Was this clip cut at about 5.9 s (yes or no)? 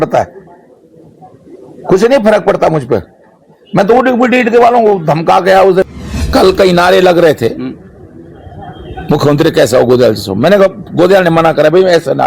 yes